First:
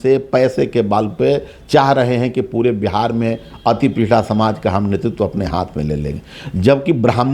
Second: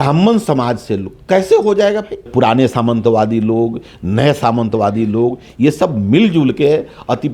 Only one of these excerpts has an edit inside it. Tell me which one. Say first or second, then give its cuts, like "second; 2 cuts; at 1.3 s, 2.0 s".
second; 1 cut; at 2.3 s